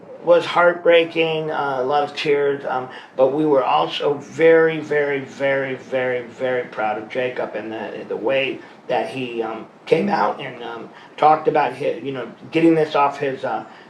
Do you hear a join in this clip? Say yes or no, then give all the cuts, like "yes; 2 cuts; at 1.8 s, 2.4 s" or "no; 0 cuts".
no; 0 cuts